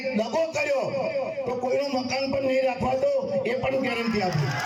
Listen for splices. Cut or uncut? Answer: uncut